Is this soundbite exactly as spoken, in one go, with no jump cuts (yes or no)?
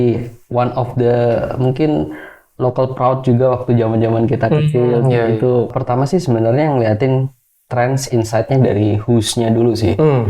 no